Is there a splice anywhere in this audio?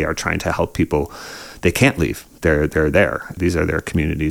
yes; 1 cut; at 3.3 s

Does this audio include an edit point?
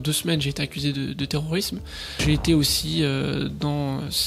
yes; 1 cut; at 2.1 s

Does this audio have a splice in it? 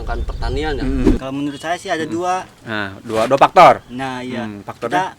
yes; 1 cut; at 1.1 s

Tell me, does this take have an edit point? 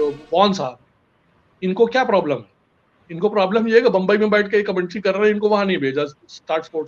no; 0 cuts

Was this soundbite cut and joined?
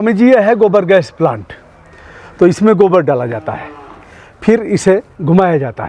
no; 0 cuts

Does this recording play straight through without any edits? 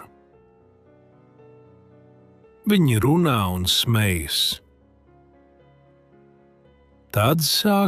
no; 4 cuts; at 0.8 s, 2.6 s, 4.6 s, 6.9 s

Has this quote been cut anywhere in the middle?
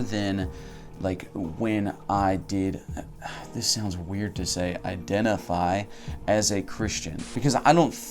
yes; 1 cut; at 7.2 s

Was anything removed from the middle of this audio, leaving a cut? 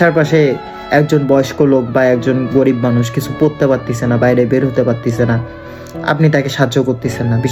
no; 0 cuts

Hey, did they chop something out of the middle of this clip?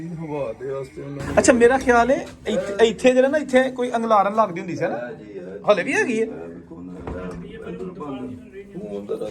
yes; 1 cut; at 1.2 s

